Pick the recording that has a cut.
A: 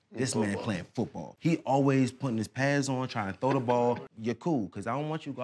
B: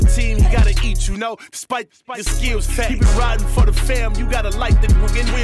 A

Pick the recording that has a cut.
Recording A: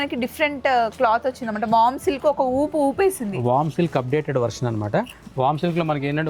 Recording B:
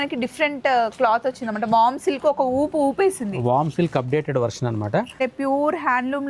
B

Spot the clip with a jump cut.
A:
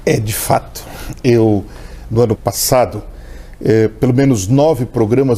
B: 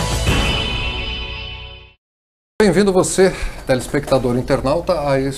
A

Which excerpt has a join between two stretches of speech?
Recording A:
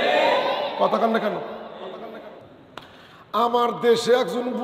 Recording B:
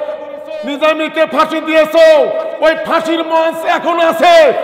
A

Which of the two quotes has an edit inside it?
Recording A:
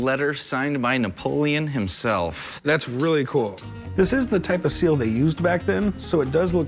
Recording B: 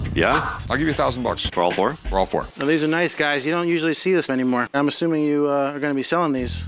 B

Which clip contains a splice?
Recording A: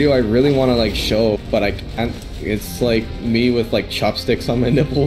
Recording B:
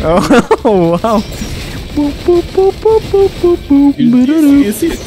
B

